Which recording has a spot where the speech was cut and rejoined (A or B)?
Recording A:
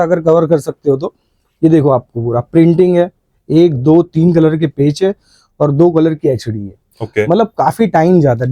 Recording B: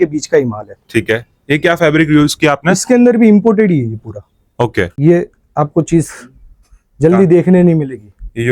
B